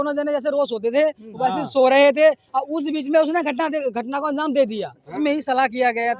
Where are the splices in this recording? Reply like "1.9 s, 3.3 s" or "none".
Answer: 5.2 s